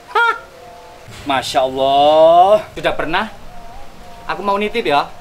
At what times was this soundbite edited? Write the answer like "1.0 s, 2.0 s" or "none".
2.7 s